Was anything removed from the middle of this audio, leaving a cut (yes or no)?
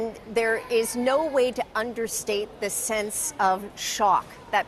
no